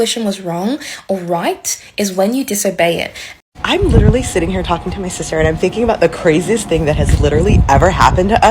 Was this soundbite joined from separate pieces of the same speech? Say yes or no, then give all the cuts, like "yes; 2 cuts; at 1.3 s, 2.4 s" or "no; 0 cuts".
yes; 1 cut; at 3.3 s